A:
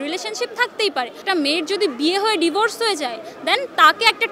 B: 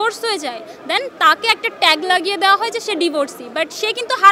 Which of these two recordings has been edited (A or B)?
A